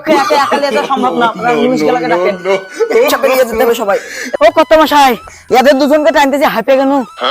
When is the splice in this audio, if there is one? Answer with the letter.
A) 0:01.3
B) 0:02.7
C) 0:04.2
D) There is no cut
C